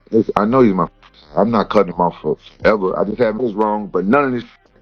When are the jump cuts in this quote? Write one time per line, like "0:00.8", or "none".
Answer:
0:03.4